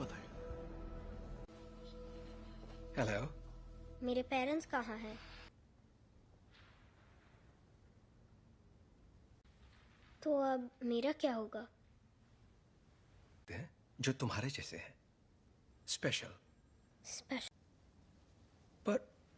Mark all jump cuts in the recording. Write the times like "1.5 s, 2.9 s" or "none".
5.5 s